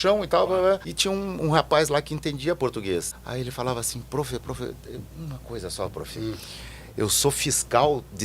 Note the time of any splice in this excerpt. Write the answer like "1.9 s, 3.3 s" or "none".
0.9 s, 3.2 s